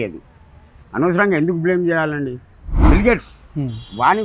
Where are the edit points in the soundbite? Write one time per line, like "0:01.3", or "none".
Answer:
0:02.7